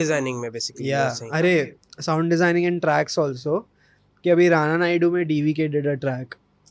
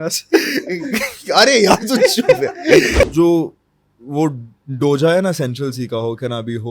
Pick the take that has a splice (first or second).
second